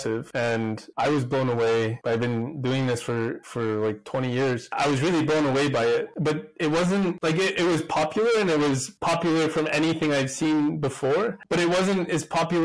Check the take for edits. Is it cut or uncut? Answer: uncut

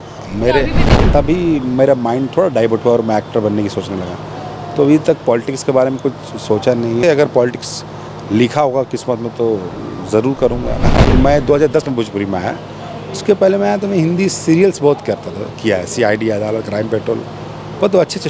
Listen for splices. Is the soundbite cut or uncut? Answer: cut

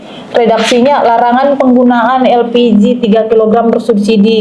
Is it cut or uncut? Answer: uncut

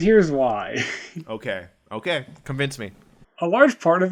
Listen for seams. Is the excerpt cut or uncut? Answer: uncut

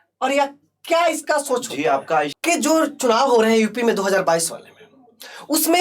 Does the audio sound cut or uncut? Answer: cut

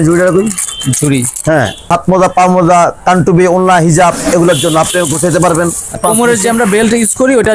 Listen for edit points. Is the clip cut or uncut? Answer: cut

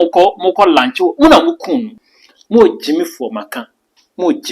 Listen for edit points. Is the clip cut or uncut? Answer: cut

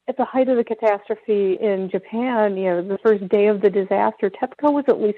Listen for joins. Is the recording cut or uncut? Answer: uncut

